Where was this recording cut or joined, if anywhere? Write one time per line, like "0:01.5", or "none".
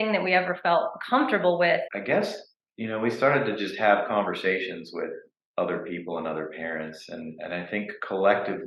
0:01.9